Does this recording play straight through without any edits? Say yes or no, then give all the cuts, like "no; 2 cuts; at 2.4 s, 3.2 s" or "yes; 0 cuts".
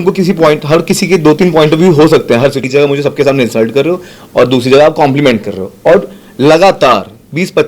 no; 1 cut; at 2.7 s